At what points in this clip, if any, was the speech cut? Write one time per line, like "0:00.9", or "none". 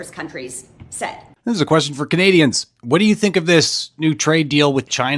0:01.2